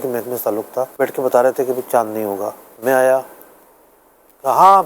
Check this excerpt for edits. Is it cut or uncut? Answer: cut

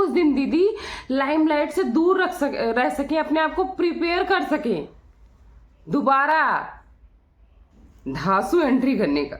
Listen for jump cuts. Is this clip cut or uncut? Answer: uncut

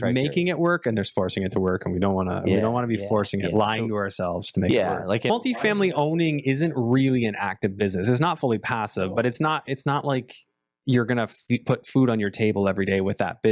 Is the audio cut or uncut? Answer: cut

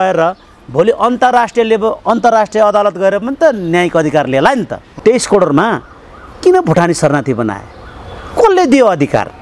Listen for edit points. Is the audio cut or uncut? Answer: cut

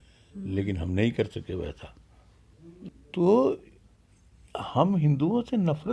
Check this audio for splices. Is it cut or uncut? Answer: cut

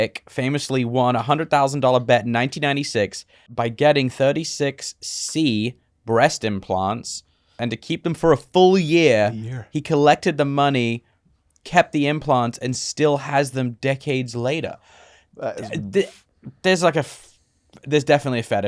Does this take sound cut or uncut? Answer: cut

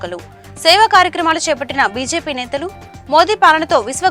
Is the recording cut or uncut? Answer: uncut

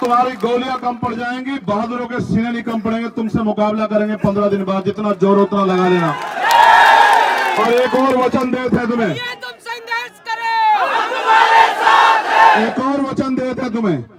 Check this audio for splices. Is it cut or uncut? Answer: uncut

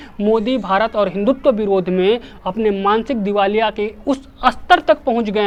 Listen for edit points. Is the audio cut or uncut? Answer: uncut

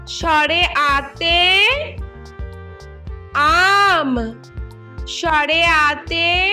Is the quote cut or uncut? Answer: uncut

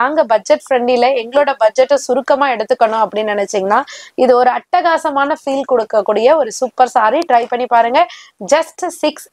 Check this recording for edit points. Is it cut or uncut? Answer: uncut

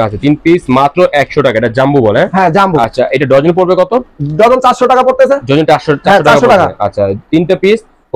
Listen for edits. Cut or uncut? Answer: uncut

